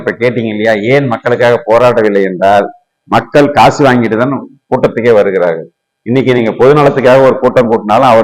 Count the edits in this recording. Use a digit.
0